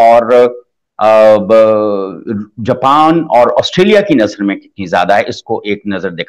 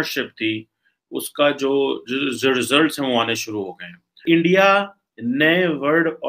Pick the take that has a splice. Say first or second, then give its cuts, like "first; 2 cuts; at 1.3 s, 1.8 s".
second; 1 cut; at 4.2 s